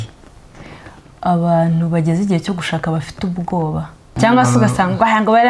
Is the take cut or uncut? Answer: cut